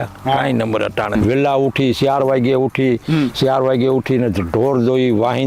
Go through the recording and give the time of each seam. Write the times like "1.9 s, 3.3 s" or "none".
1.2 s